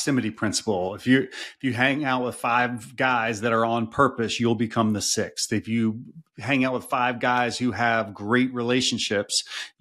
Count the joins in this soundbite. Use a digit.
0